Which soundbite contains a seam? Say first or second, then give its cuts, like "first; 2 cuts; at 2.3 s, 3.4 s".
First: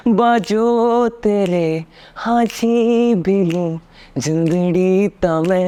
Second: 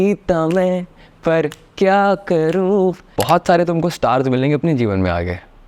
second; 1 cut; at 3.0 s